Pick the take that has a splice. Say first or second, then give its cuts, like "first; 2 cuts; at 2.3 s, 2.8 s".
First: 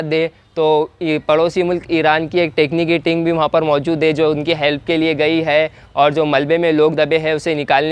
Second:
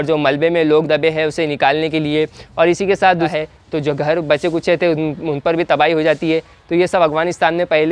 second; 1 cut; at 3.3 s